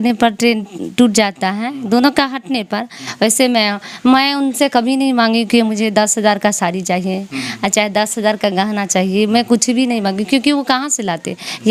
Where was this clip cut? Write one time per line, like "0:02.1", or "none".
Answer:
none

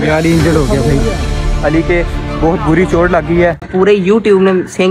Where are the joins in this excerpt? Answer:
0:03.6

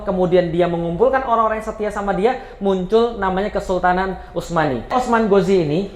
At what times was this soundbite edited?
0:04.9

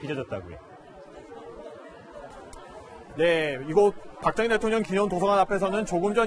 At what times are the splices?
none

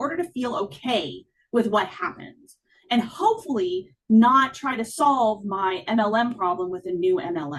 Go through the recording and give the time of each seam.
none

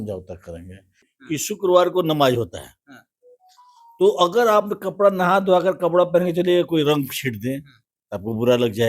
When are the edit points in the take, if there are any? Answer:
0:01.1

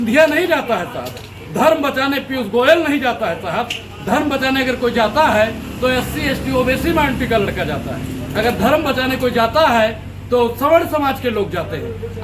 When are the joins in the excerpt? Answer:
none

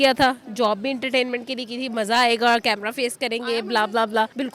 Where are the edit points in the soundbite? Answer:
none

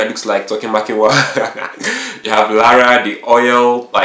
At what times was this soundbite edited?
none

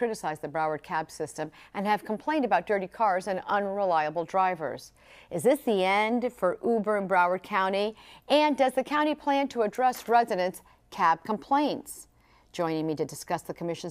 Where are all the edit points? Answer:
none

